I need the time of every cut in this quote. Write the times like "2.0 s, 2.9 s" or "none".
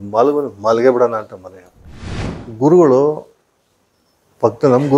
1.9 s